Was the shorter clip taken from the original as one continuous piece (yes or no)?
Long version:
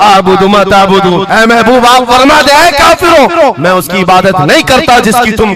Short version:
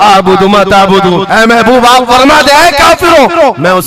yes